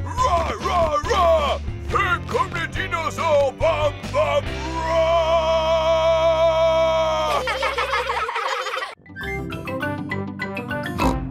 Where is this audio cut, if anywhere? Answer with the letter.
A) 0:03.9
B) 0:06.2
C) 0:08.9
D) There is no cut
C